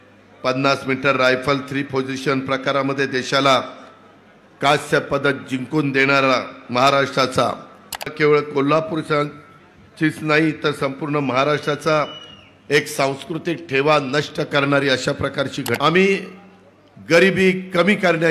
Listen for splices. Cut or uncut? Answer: cut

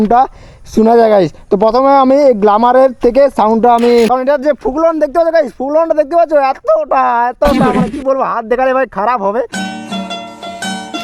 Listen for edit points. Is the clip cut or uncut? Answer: cut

